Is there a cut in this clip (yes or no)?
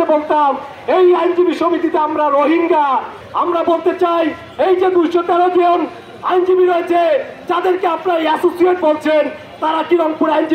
yes